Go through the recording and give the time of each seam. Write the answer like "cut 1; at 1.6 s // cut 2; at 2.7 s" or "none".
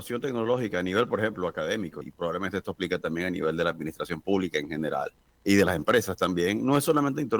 cut 1; at 2.0 s // cut 2; at 5.2 s